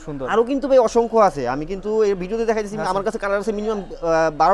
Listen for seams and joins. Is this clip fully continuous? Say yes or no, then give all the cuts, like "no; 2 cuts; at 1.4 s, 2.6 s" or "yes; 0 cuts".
yes; 0 cuts